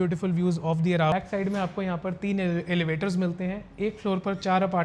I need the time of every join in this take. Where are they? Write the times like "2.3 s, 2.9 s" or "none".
1.1 s